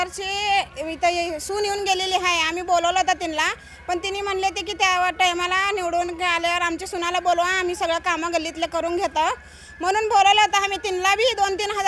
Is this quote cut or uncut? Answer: uncut